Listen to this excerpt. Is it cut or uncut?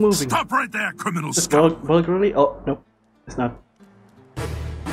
uncut